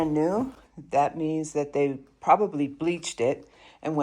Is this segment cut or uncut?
uncut